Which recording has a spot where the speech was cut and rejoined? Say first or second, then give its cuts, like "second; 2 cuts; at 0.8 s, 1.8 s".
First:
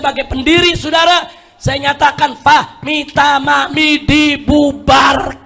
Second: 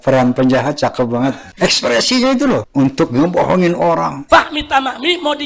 second; 3 cuts; at 1.5 s, 2.7 s, 4.2 s